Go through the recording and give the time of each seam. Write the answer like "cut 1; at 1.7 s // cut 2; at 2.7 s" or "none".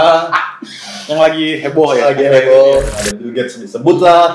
cut 1; at 2.9 s